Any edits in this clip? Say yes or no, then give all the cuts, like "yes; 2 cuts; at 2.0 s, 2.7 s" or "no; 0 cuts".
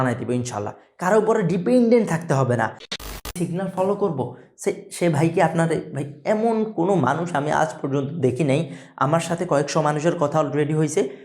yes; 1 cut; at 2.8 s